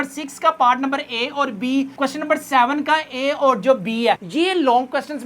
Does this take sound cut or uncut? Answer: cut